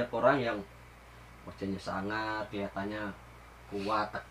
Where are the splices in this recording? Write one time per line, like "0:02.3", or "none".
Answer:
none